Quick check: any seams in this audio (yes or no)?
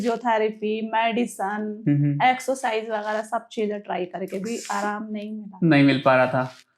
no